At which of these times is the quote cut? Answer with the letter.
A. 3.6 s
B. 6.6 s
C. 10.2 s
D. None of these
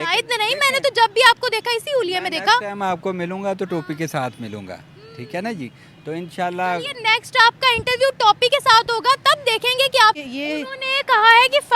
C